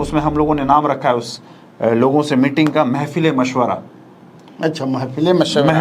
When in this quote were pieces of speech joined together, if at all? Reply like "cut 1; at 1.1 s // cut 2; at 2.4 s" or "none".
none